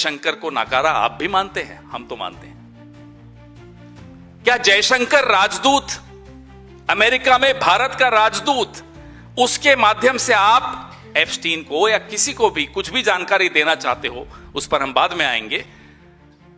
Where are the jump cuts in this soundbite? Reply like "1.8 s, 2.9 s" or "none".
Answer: 2.4 s, 4.3 s, 15.6 s